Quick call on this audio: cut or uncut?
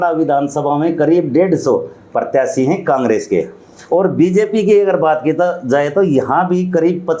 uncut